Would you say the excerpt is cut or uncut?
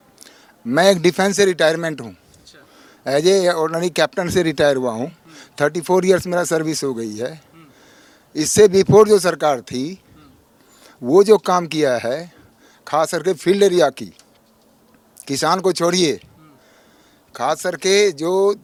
uncut